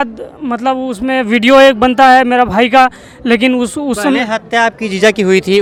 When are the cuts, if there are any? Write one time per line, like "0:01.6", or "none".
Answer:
none